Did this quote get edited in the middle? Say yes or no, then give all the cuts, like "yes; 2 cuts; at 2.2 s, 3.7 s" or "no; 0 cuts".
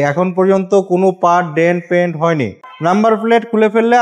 yes; 1 cut; at 2.6 s